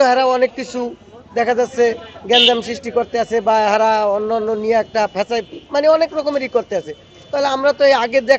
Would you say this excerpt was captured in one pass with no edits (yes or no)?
yes